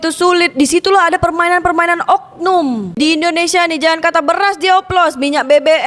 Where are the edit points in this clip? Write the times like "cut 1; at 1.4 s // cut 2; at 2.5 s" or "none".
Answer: cut 1; at 3.0 s